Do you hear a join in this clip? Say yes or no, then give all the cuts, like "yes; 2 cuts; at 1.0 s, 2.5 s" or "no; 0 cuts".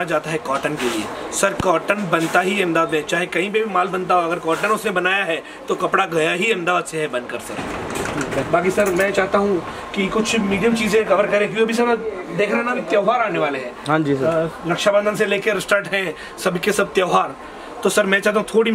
no; 0 cuts